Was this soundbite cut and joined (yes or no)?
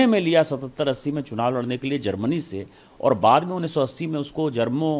no